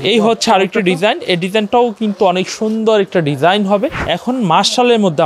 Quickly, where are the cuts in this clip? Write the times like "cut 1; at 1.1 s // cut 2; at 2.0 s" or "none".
cut 1; at 4.0 s